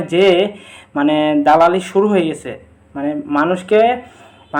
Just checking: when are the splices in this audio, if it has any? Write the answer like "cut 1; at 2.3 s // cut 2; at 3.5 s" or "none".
none